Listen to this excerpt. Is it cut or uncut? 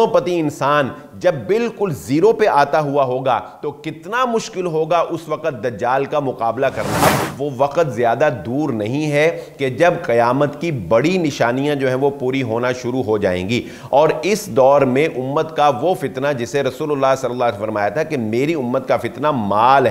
cut